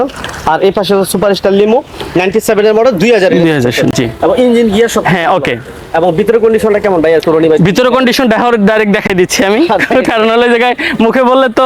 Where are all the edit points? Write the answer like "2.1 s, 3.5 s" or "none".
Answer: none